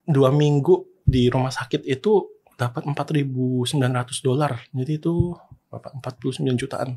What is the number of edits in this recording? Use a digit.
0